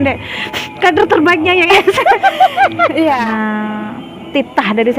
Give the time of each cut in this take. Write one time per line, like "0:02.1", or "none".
0:03.2